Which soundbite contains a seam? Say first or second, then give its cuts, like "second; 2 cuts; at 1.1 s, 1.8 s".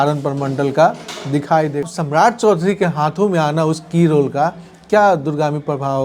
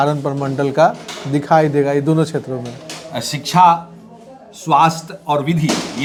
first; 1 cut; at 1.9 s